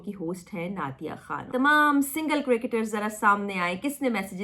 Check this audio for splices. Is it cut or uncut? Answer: cut